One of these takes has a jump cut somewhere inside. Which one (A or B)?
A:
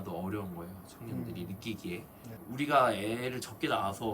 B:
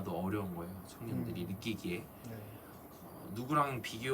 A